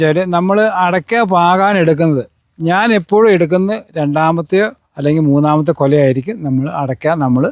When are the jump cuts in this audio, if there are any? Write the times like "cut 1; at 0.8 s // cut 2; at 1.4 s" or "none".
none